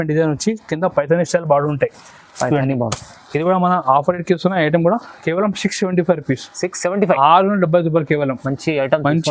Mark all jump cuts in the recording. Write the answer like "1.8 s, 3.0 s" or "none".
none